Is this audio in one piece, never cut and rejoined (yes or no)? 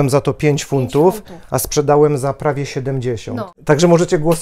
no